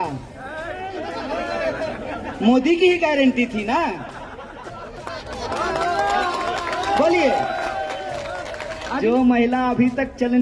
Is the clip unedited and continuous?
no; 1 cut; at 9.0 s

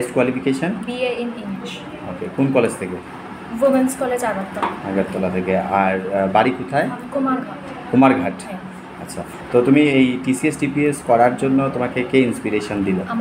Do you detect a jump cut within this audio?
no; 0 cuts

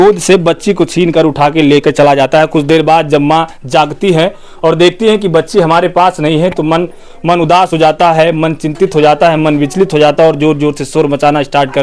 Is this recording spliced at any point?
no; 0 cuts

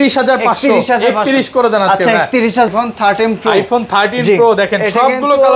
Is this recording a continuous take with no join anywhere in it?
no; 1 cut; at 2.7 s

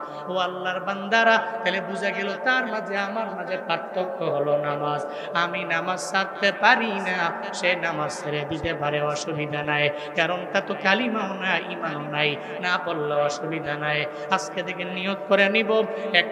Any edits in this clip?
no; 0 cuts

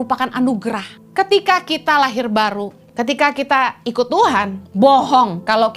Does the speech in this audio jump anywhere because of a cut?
yes; 3 cuts; at 1.0 s, 2.8 s, 4.6 s

